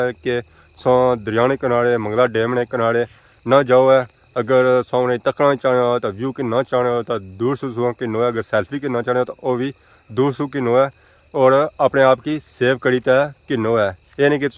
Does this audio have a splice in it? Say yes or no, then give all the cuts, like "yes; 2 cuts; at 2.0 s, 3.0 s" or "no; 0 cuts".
no; 0 cuts